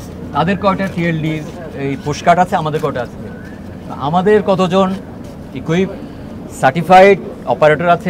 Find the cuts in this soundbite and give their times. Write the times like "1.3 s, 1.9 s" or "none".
none